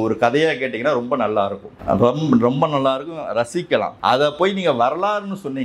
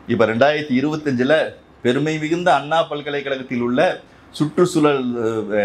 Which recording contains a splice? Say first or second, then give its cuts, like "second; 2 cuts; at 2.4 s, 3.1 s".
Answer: first; 2 cuts; at 1.7 s, 3.9 s